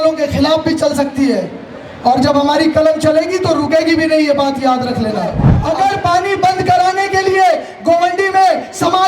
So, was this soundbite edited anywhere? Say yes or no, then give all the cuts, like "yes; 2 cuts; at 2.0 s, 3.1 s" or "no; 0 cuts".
yes; 1 cut; at 5.5 s